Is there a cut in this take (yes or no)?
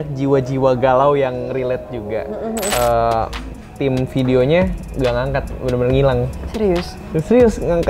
yes